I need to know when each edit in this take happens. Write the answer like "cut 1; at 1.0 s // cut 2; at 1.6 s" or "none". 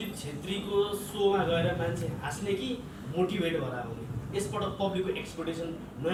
none

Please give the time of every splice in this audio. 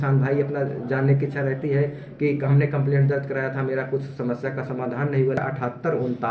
cut 1; at 5.4 s

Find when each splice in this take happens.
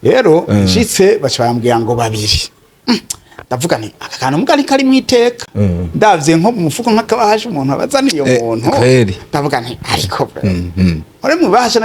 none

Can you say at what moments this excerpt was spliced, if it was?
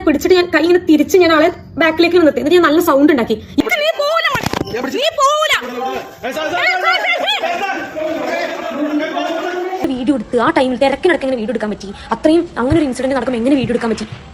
cut 1; at 3.6 s // cut 2; at 9.9 s

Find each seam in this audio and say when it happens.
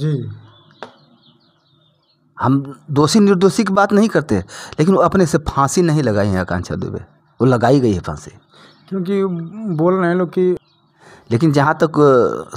cut 1; at 10.6 s

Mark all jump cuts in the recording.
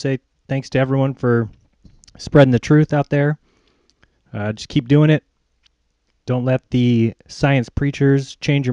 none

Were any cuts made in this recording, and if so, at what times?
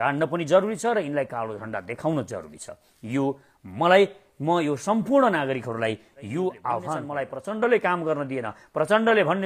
cut 1; at 7.1 s

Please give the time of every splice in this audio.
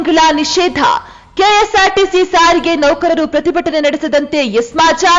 none

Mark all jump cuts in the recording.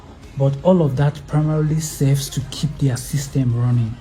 none

